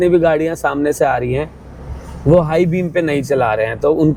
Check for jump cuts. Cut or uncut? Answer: uncut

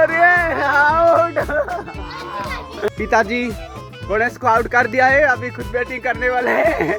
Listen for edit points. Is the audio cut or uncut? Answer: uncut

